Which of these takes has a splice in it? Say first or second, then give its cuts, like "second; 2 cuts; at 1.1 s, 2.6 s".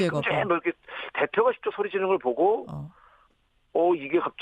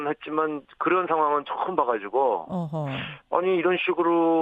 second; 1 cut; at 2.5 s